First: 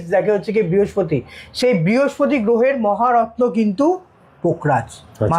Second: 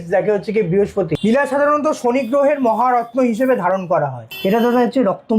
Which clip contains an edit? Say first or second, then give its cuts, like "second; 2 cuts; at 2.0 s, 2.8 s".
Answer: second; 2 cuts; at 1.1 s, 4.2 s